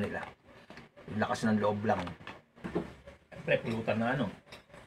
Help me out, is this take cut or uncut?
cut